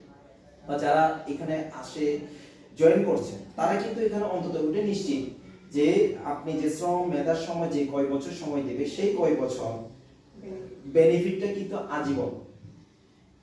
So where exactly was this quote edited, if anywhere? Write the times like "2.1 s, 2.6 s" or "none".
none